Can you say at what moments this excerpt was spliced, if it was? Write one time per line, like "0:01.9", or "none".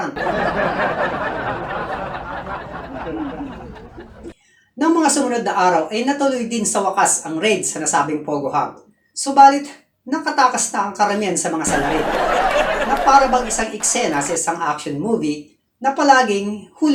none

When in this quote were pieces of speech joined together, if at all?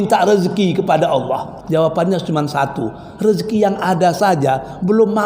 0:01.5

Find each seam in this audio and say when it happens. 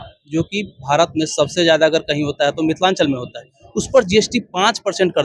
none

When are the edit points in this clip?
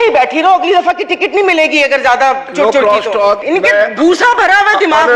0:03.4

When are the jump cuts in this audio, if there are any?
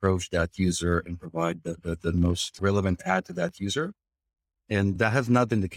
0:02.5
0:05.0

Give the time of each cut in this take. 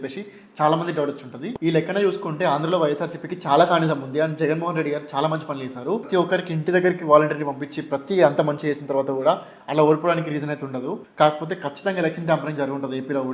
0:01.6
0:06.1

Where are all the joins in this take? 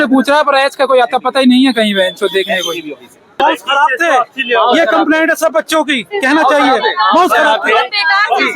0:03.4

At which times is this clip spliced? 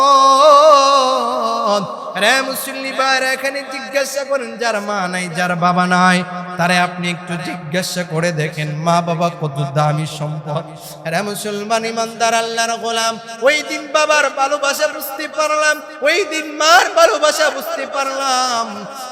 none

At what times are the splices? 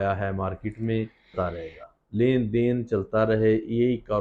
0:01.3

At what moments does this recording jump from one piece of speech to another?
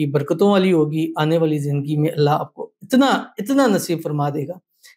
none

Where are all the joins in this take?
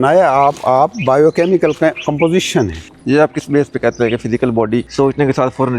0:04.9

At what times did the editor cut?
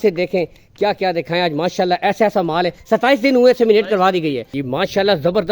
0:04.6

